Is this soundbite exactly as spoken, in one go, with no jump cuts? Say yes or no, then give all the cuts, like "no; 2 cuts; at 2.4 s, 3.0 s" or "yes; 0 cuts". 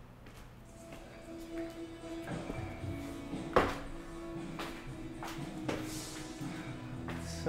no; 1 cut; at 2.3 s